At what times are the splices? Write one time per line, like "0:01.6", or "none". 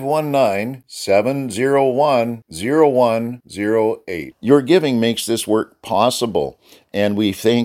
none